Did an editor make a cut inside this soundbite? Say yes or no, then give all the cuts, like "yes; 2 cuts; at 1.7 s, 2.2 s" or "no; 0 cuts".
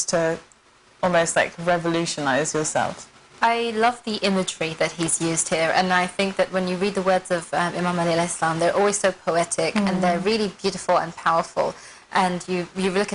yes; 1 cut; at 2.8 s